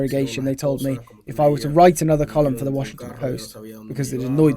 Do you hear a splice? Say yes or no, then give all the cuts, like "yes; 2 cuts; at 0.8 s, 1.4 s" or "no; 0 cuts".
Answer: no; 0 cuts